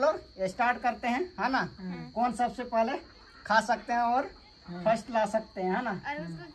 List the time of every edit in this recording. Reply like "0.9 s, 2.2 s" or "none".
none